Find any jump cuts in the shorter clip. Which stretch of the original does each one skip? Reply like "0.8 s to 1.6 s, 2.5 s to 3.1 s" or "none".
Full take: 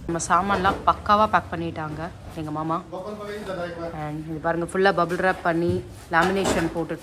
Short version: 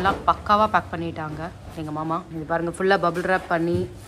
2.9 s to 4.2 s